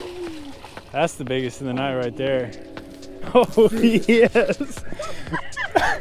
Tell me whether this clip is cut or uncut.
uncut